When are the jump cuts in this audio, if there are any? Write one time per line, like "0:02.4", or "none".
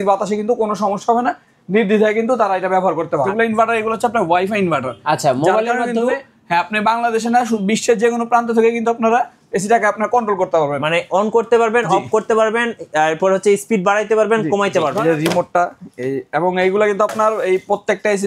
0:03.3
0:15.0